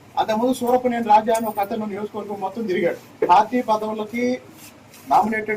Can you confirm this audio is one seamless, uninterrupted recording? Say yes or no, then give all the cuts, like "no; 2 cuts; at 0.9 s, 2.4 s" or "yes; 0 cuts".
no; 1 cut; at 3.1 s